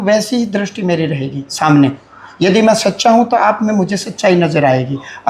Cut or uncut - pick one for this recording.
uncut